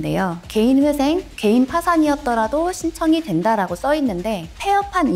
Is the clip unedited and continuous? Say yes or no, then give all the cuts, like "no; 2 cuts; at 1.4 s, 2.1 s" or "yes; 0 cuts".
yes; 0 cuts